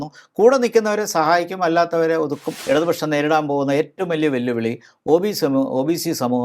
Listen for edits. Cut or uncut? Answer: cut